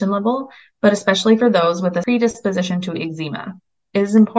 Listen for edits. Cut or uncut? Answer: cut